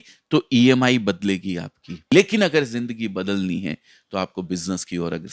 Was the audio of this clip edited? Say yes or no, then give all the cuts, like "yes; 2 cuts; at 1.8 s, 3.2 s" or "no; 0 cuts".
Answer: yes; 1 cut; at 2.1 s